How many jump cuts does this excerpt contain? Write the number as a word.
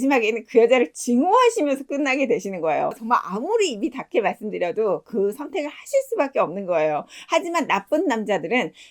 one